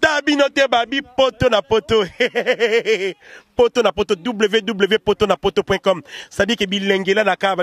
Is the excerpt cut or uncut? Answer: uncut